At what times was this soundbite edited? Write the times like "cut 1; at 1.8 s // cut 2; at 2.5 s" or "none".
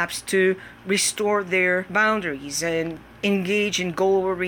cut 1; at 1.9 s // cut 2; at 3.0 s